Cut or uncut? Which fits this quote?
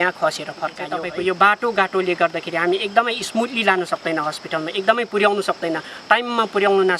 cut